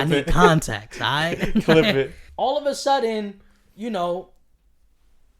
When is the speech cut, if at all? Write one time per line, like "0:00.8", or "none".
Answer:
0:02.2